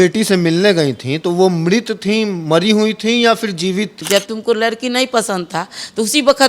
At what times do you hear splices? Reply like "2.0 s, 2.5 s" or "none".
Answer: 4.0 s